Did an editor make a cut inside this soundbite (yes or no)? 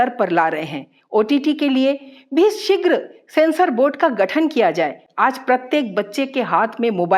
no